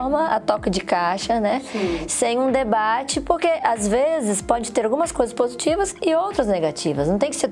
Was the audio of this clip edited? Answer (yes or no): no